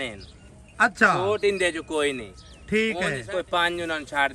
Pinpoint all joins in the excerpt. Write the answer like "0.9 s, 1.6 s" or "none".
3.2 s